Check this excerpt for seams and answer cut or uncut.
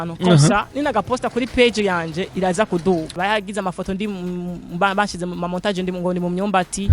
cut